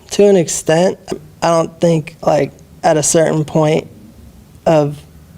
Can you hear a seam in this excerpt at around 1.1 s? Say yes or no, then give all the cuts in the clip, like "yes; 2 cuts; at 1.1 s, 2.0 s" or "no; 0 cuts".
yes; 1 cut; at 1.1 s